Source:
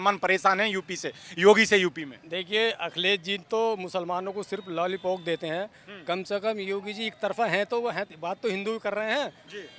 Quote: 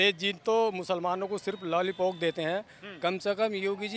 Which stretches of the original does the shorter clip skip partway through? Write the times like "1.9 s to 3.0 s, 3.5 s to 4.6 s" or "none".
none